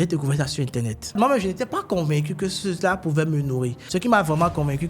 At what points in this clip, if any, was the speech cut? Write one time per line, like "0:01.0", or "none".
0:01.2
0:03.8